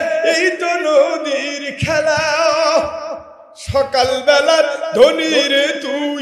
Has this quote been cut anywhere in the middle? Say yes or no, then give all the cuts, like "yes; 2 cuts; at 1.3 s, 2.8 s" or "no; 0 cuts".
no; 0 cuts